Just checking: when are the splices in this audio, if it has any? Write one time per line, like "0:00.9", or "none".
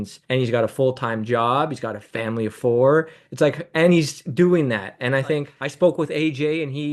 0:05.5